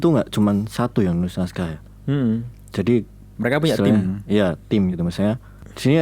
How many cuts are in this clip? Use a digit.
1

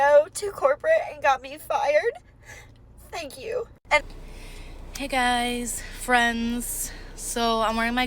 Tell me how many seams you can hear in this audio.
1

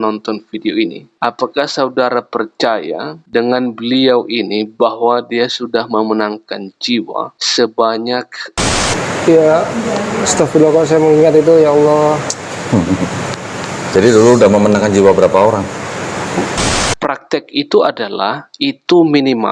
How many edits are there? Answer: 2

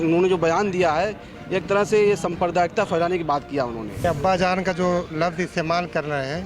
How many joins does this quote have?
1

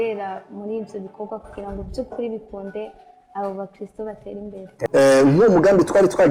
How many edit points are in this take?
1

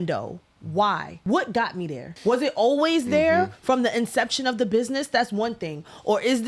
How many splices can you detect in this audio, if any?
2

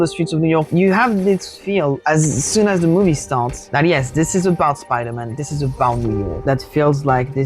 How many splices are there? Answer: 1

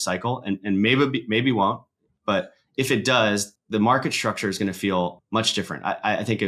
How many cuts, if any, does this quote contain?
2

